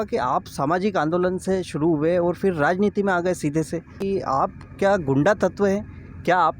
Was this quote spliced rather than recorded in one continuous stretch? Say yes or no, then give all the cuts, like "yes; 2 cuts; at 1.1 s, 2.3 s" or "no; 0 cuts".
yes; 1 cut; at 4.0 s